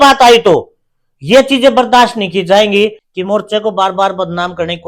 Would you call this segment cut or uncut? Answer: cut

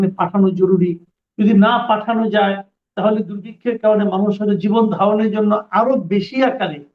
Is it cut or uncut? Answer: uncut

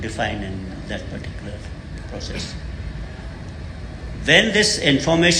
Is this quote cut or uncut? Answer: uncut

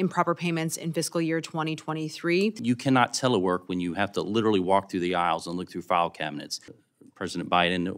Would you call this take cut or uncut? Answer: cut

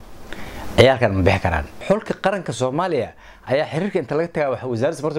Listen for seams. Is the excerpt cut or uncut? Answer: cut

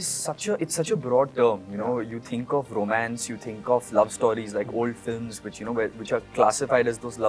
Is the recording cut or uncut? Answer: uncut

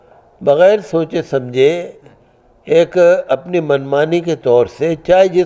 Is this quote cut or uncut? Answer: uncut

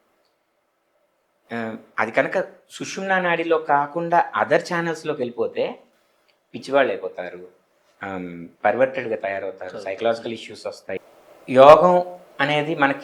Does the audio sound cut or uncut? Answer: cut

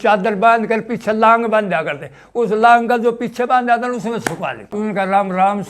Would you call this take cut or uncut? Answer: cut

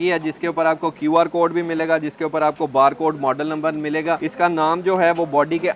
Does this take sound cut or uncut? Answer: uncut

